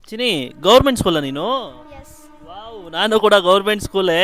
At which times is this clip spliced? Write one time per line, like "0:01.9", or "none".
none

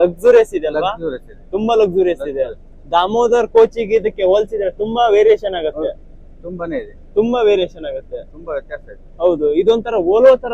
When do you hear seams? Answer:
none

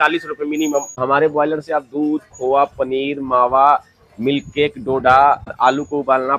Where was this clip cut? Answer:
0:00.9
0:05.5

